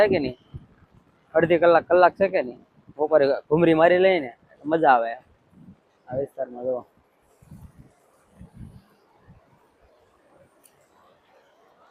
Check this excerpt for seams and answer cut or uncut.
uncut